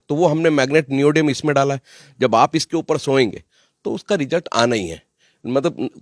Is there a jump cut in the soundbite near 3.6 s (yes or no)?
no